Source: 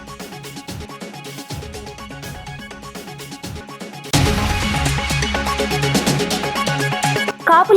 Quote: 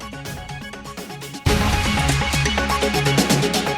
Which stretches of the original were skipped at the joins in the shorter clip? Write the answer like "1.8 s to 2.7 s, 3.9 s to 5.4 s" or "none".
3.4 s to 4.2 s